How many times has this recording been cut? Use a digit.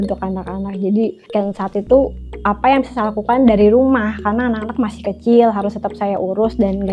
1